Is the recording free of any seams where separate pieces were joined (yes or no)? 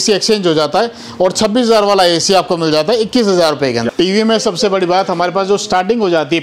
no